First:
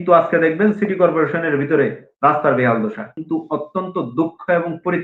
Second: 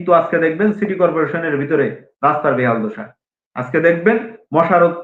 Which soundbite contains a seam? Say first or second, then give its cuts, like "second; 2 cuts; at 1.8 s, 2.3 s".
first; 1 cut; at 3.2 s